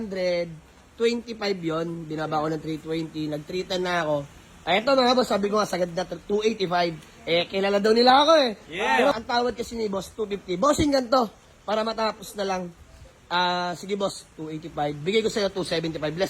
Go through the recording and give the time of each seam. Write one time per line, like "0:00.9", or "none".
0:09.1